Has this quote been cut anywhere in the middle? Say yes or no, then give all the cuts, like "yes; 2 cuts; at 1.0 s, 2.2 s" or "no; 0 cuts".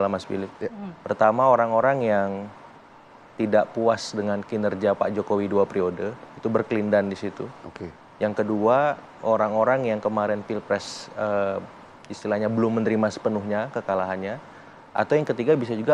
no; 0 cuts